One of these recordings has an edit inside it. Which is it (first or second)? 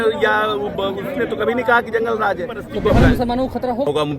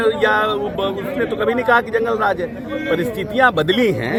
first